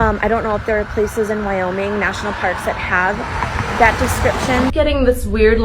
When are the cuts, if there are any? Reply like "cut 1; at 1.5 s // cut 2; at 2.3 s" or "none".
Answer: cut 1; at 4.7 s